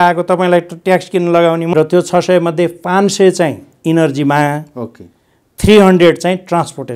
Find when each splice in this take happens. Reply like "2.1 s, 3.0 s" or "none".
1.7 s